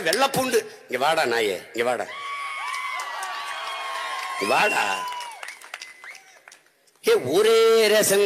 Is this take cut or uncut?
uncut